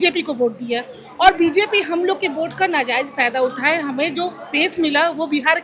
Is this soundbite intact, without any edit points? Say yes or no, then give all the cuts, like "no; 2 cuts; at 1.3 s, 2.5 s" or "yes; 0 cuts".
yes; 0 cuts